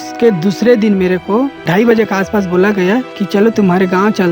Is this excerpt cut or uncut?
cut